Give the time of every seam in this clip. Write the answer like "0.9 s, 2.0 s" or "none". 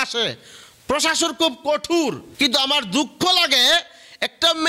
2.3 s